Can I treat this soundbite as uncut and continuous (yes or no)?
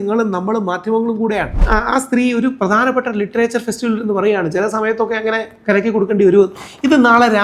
no